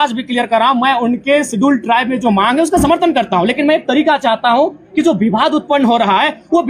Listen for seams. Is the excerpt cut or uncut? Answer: uncut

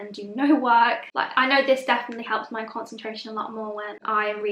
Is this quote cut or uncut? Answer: cut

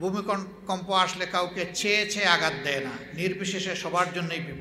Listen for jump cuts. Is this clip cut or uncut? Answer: uncut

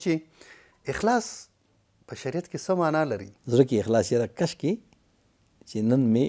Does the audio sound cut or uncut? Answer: cut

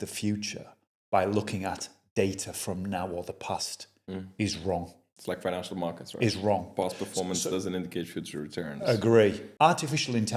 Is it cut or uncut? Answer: cut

